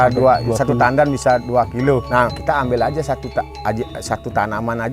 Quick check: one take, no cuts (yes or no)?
no